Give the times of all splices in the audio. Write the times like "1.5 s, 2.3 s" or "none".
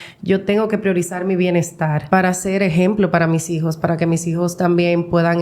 2.1 s